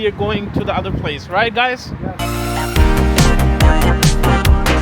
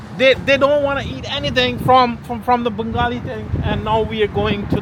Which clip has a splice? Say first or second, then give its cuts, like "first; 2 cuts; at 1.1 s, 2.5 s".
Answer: first; 1 cut; at 2.2 s